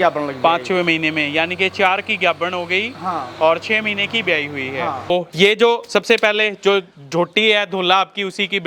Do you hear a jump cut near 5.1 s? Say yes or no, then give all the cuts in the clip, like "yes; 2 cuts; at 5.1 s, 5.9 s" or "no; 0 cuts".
yes; 1 cut; at 5.1 s